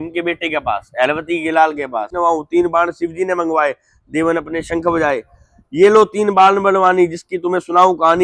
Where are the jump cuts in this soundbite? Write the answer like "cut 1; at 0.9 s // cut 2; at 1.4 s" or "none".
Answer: cut 1; at 2.1 s